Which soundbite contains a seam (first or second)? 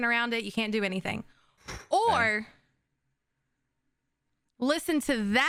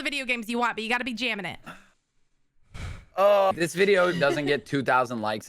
second